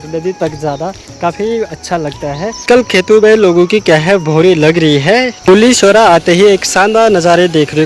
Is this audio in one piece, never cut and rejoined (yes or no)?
no